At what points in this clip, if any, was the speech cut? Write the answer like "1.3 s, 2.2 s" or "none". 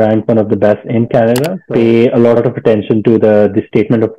1.6 s, 2.4 s